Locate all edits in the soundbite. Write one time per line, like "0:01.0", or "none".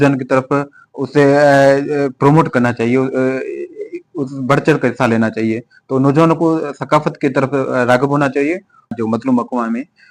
0:09.0